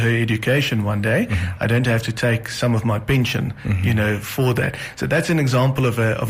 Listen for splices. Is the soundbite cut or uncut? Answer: uncut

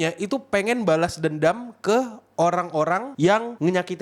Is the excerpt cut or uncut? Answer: uncut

